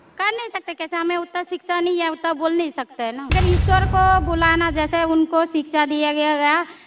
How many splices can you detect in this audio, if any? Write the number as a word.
one